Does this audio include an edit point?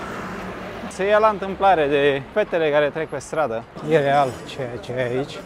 yes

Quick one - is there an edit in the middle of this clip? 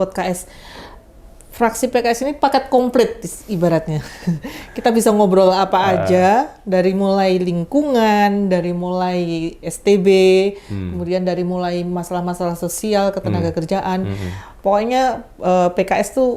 no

